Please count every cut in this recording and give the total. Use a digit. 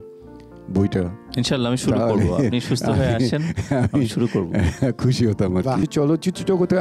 1